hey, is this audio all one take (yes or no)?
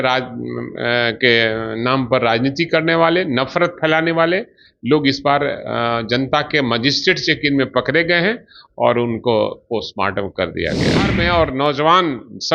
no